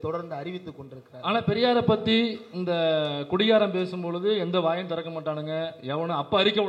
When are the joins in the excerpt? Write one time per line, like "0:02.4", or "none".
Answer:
none